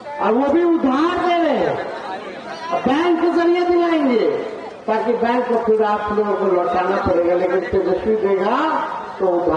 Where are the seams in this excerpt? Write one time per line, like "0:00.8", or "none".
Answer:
none